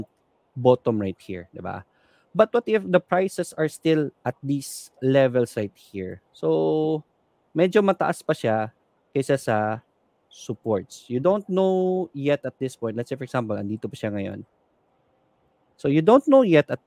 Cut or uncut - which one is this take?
uncut